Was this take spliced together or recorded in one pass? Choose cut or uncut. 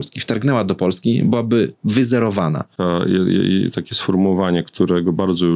cut